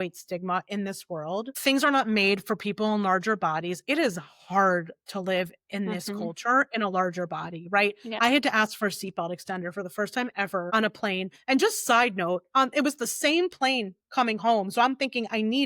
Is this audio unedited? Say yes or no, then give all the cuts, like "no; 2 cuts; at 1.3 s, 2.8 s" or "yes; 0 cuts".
no; 2 cuts; at 1.5 s, 10.7 s